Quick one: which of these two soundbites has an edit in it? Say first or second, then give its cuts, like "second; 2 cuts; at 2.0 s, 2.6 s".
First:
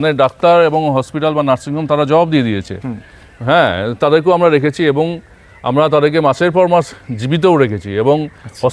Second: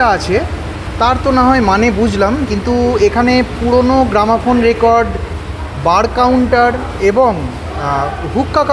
second; 1 cut; at 2.5 s